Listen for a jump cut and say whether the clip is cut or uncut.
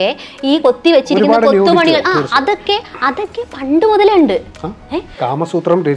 uncut